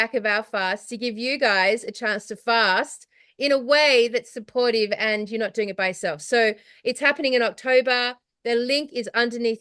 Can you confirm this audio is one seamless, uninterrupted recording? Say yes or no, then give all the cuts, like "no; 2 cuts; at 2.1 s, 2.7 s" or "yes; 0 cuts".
yes; 0 cuts